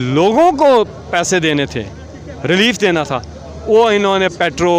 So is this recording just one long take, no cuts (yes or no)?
yes